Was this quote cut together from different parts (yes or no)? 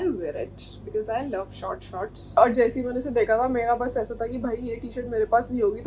yes